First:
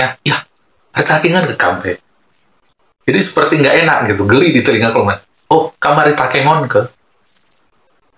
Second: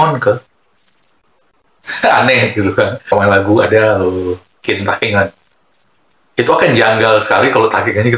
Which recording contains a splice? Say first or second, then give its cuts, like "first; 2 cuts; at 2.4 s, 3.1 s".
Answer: second; 1 cut; at 3.1 s